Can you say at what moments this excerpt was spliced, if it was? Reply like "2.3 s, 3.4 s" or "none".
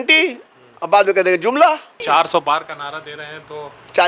2.0 s